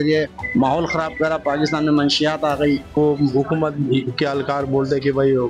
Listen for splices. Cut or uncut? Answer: cut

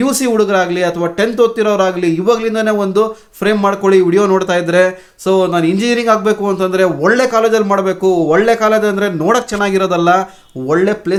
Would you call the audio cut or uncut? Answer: uncut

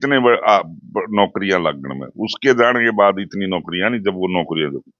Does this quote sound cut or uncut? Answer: uncut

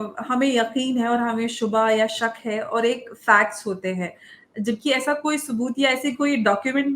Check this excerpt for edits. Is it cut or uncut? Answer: uncut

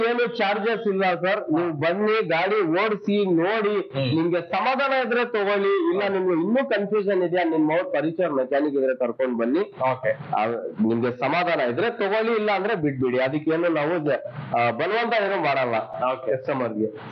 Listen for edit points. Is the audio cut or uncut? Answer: uncut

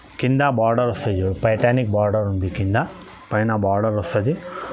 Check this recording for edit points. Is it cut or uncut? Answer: uncut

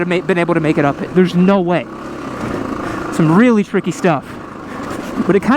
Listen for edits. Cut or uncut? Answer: uncut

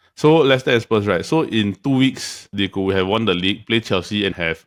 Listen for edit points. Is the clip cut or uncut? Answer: uncut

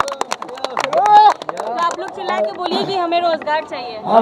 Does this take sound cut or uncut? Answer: uncut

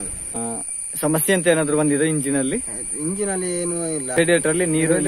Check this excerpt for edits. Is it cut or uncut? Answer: uncut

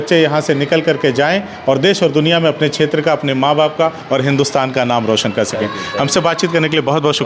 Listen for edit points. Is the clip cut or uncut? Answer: uncut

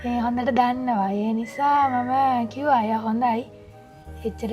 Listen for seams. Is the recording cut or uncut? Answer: uncut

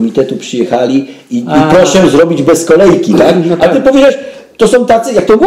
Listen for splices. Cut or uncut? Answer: uncut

